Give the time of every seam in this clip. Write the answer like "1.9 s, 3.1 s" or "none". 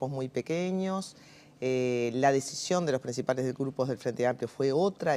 0.9 s

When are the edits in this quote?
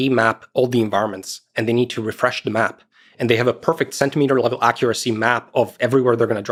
none

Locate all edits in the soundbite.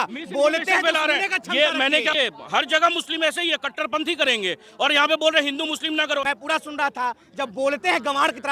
2.1 s, 6.2 s

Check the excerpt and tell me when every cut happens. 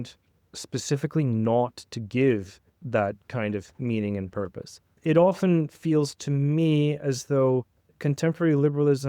5.0 s, 7.8 s

